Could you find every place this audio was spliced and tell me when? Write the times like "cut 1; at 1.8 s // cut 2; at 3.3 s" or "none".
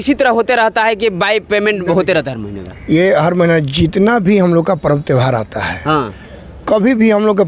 none